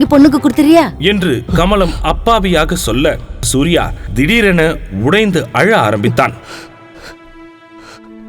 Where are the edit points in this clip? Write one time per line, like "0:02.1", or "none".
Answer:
none